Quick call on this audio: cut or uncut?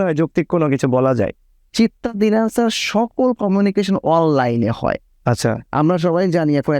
cut